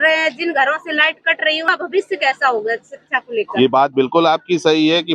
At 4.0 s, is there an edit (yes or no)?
no